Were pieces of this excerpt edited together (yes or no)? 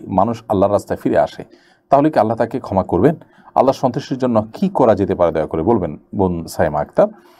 no